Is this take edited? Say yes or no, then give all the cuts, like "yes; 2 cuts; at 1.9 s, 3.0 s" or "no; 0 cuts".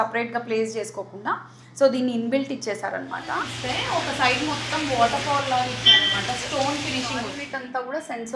yes; 2 cuts; at 3.5 s, 7.4 s